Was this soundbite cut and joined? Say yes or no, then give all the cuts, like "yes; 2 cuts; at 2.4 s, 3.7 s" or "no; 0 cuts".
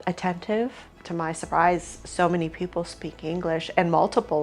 yes; 1 cut; at 1.0 s